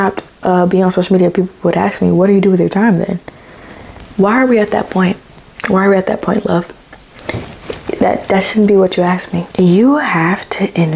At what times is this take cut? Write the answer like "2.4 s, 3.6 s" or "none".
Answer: 9.4 s